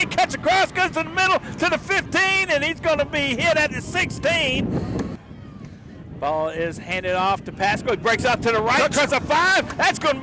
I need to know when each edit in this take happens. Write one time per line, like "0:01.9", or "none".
0:05.2